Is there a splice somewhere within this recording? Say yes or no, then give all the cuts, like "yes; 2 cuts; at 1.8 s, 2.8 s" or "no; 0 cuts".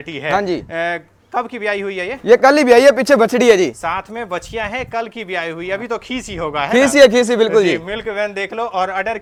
no; 0 cuts